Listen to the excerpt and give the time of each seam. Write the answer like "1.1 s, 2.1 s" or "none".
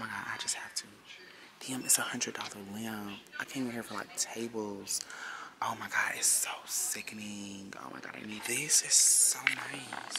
none